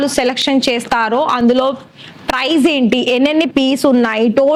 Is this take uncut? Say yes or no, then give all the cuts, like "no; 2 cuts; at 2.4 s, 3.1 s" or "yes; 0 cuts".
yes; 0 cuts